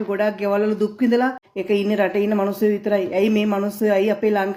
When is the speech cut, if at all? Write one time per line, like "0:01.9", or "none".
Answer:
0:01.5